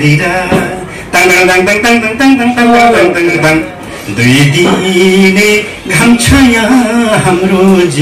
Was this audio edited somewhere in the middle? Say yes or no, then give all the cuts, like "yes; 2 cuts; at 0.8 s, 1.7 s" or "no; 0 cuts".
yes; 1 cut; at 3.4 s